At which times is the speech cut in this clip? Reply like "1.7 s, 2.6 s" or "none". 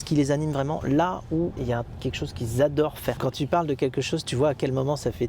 1.5 s, 3.2 s

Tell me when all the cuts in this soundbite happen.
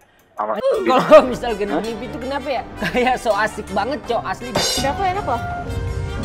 4.8 s

